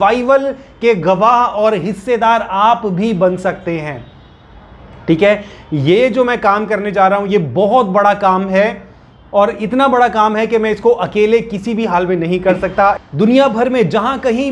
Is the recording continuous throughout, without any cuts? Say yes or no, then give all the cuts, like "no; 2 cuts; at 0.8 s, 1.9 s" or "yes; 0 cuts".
no; 1 cut; at 13.0 s